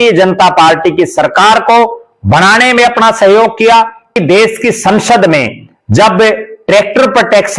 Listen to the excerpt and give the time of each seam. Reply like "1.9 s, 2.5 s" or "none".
4.1 s

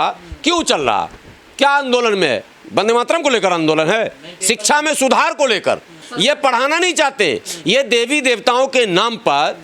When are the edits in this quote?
6.0 s

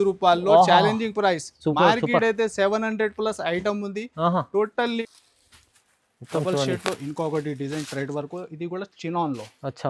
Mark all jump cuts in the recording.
5.0 s

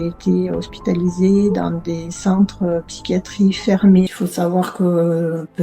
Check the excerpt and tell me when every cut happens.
4.1 s

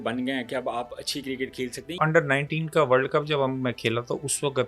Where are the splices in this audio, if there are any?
2.0 s

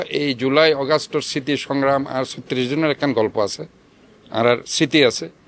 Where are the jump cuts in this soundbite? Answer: none

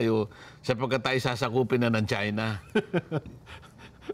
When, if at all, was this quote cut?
none

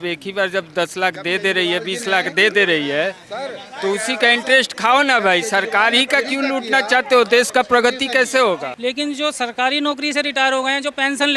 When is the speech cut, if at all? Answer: 8.7 s

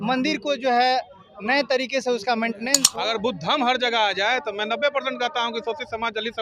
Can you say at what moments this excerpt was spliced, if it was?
2.8 s

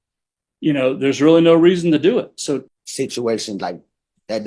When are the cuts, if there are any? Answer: 2.8 s

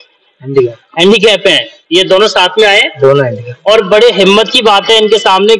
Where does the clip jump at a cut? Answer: none

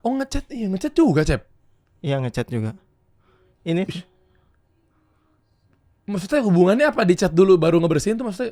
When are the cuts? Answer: none

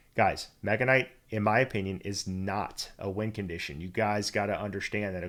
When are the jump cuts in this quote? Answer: none

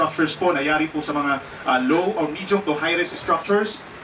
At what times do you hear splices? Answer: none

